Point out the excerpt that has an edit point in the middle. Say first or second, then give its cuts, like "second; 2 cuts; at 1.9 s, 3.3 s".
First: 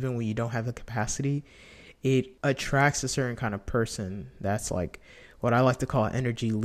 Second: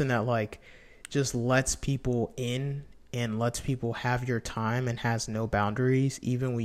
first; 1 cut; at 2.3 s